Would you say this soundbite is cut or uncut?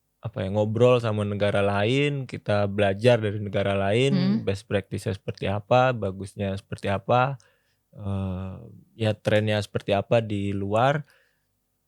uncut